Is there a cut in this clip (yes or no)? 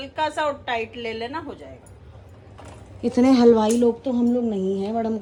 no